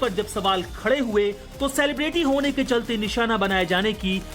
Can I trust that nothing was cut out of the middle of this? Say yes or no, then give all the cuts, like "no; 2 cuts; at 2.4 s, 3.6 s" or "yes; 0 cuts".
yes; 0 cuts